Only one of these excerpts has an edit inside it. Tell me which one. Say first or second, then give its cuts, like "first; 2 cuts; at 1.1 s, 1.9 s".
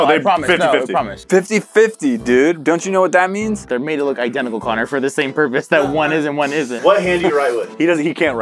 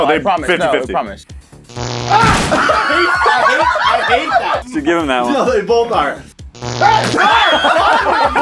second; 3 cuts; at 1.2 s, 4.6 s, 6.3 s